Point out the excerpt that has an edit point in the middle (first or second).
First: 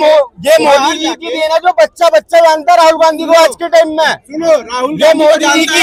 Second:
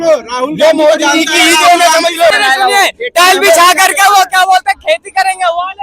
second